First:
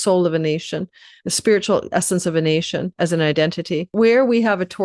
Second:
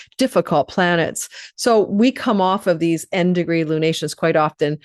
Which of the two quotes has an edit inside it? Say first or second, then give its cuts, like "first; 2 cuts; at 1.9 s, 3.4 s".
first; 1 cut; at 3.9 s